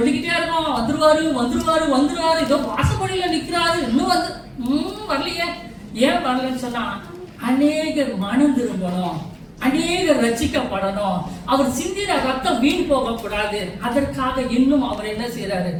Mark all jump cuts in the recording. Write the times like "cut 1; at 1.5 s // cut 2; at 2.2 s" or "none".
none